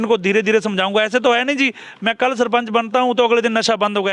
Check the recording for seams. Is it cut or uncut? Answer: uncut